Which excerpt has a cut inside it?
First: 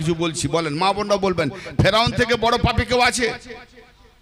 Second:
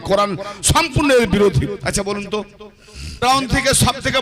second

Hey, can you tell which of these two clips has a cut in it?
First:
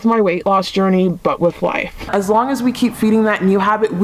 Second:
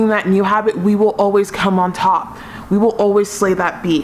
first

